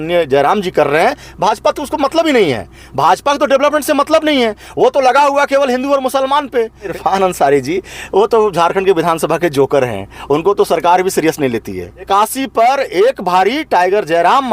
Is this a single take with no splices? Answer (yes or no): no